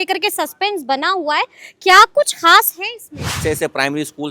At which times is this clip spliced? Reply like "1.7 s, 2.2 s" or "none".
3.4 s